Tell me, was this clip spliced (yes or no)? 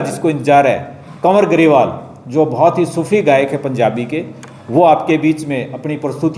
no